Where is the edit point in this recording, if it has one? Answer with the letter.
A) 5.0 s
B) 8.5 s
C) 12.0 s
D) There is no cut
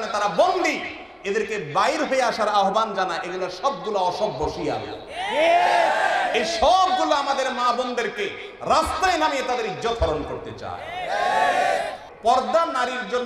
C